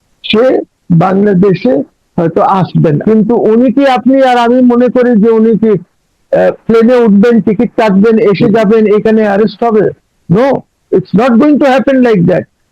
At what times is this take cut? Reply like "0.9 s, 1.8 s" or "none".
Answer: 3.0 s